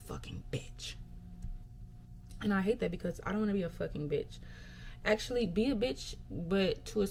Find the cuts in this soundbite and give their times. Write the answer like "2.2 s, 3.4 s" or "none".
none